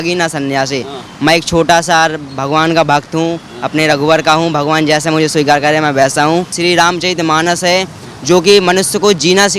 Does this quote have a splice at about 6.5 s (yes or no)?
yes